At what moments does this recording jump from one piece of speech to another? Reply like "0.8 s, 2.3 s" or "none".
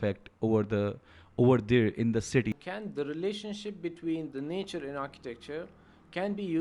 2.5 s

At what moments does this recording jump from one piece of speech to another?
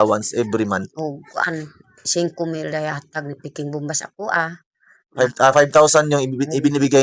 none

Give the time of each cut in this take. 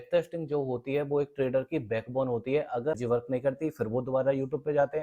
2.9 s

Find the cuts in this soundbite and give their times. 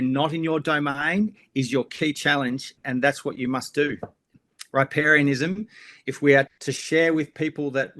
2.8 s, 4.3 s, 6.5 s

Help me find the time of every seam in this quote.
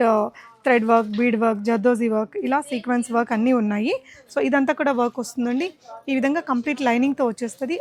none

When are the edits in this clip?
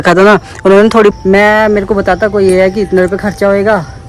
1.1 s

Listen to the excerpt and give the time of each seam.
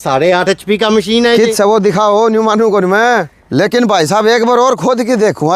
3.4 s

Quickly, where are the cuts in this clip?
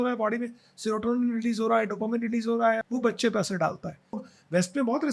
2.8 s, 4.2 s

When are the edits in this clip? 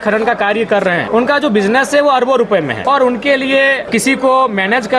1.0 s, 2.8 s, 3.8 s

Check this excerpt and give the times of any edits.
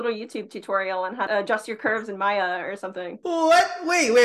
1.3 s, 3.1 s

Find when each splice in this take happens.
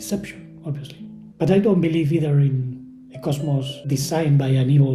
1.2 s, 3.8 s

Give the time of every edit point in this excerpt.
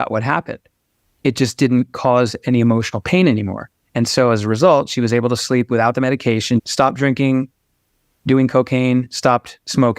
6.7 s

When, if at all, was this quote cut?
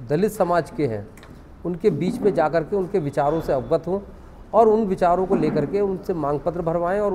none

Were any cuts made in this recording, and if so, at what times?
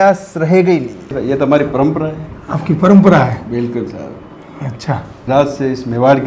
1.2 s, 5.3 s

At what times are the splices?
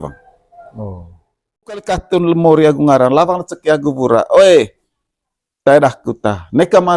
1.8 s

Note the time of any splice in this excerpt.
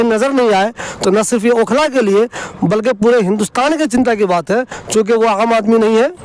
none

